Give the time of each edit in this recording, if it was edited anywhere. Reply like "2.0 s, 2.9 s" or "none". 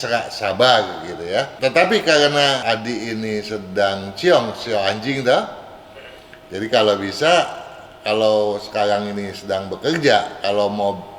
1.5 s, 2.6 s

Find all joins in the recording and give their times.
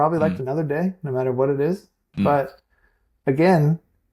none

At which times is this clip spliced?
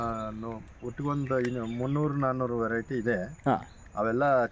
none

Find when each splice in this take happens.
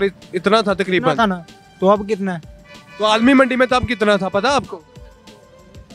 none

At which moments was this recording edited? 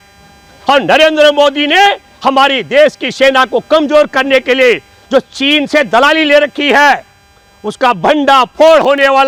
none

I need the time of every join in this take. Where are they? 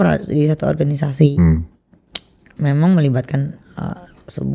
none

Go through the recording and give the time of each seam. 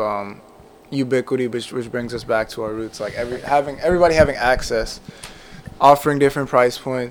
none

